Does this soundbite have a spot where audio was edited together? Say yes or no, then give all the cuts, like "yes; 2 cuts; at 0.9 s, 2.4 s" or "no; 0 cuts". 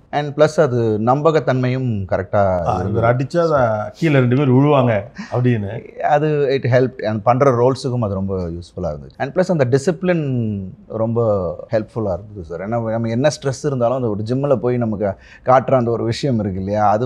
yes; 1 cut; at 11.6 s